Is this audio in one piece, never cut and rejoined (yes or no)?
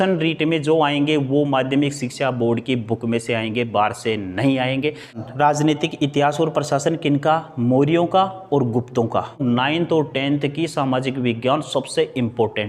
no